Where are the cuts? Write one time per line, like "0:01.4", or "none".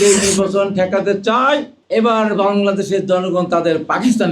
0:01.8